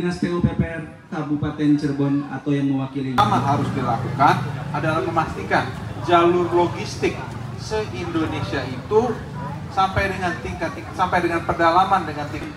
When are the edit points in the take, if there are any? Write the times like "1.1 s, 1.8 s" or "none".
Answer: 3.1 s